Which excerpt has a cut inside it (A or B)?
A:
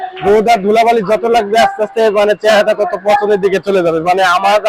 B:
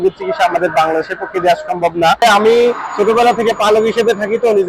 B